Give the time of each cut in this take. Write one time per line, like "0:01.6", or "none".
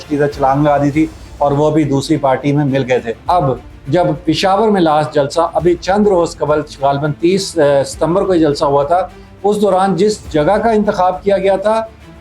0:03.2